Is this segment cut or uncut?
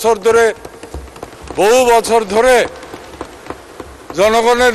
uncut